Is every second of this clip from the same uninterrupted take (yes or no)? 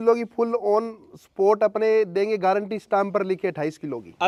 yes